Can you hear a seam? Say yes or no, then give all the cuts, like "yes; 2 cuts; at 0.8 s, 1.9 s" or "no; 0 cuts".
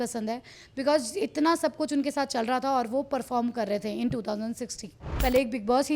yes; 1 cut; at 5.0 s